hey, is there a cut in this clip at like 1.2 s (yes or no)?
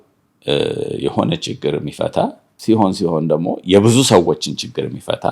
no